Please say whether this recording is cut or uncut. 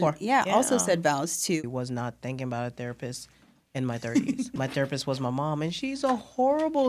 cut